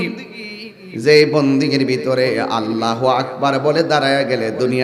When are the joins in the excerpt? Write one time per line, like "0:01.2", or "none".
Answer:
none